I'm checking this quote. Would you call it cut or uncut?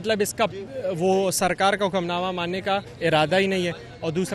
uncut